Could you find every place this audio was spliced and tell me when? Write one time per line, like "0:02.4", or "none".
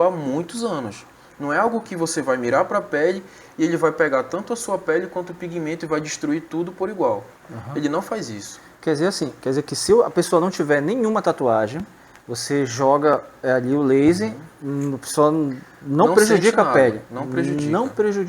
none